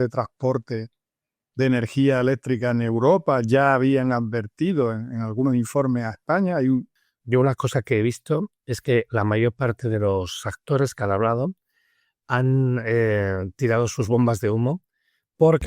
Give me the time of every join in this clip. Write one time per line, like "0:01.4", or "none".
0:07.0